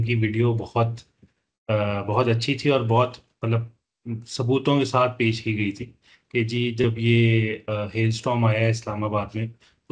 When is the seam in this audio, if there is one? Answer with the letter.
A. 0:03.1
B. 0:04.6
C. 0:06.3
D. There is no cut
D